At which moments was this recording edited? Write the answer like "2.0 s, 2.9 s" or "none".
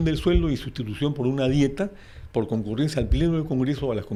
none